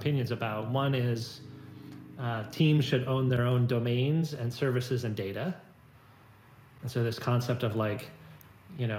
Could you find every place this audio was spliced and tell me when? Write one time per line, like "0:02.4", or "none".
none